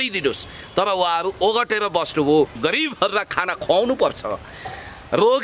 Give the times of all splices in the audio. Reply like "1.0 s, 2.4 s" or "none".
2.6 s